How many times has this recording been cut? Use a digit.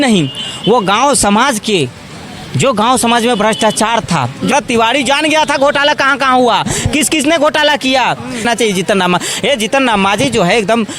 2